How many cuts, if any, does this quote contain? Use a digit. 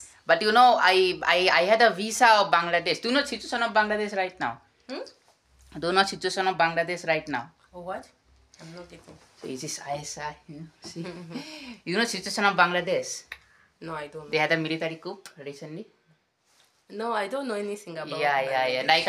0